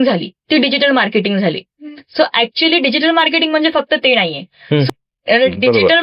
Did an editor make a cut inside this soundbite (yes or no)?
yes